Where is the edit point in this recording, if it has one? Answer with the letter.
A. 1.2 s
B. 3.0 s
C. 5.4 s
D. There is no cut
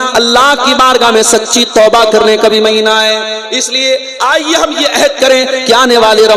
D